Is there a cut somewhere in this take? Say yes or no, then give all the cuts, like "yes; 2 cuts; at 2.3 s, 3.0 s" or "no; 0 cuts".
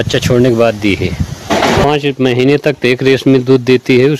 yes; 1 cut; at 1.8 s